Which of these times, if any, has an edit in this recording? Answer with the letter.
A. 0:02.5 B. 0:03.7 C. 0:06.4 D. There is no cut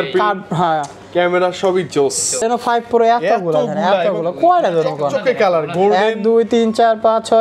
A